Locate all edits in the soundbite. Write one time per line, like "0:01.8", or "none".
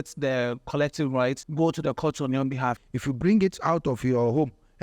0:01.4
0:02.8